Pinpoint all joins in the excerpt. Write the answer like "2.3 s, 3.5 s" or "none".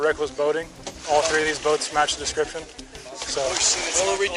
none